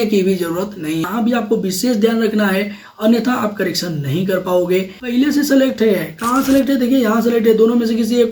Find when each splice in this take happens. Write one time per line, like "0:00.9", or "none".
0:01.1
0:05.0